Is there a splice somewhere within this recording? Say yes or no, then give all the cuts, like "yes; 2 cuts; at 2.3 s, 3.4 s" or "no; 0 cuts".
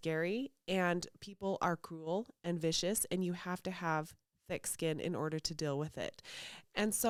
no; 0 cuts